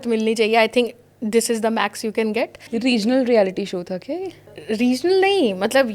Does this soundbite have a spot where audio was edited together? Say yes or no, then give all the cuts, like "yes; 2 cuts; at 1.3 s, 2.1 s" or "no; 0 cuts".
yes; 2 cuts; at 2.9 s, 4.6 s